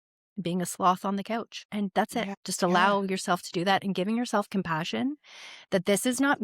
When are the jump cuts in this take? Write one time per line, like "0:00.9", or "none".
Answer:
0:01.6
0:02.2